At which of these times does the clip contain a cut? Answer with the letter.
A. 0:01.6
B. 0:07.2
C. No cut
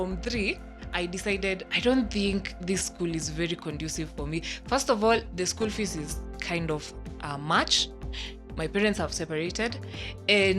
A